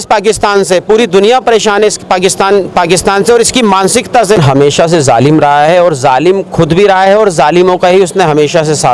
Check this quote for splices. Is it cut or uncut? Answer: cut